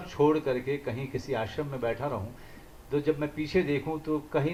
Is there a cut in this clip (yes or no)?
no